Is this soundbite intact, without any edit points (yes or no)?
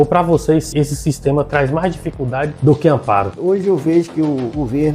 yes